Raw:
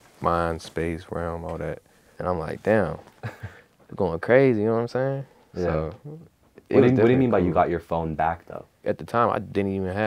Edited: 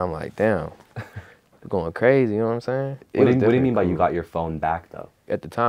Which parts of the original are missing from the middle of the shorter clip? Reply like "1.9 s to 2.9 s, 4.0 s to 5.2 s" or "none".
5.2 s to 6.5 s